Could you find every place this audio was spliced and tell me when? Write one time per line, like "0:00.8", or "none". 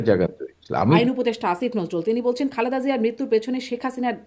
0:01.0